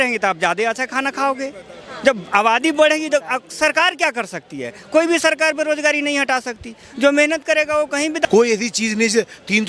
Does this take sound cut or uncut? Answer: cut